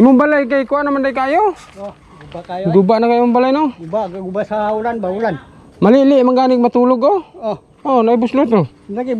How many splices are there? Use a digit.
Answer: 0